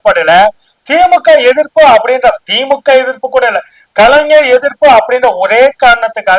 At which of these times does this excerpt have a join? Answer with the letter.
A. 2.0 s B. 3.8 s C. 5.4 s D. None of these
D